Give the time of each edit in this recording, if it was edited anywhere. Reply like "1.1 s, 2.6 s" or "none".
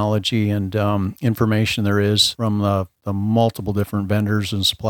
none